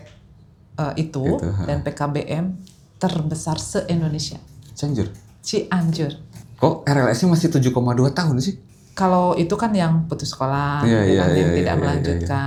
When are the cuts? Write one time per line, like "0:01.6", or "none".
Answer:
none